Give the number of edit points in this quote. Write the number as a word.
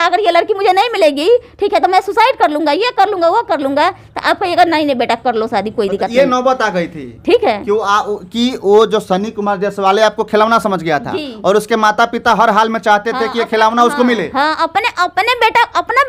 zero